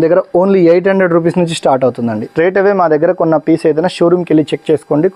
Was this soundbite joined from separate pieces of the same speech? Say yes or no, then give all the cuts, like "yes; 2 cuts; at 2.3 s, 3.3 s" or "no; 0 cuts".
yes; 1 cut; at 2.3 s